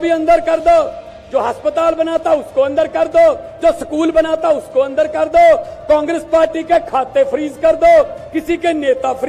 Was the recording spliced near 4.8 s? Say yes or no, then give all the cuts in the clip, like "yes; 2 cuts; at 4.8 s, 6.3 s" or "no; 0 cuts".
no; 0 cuts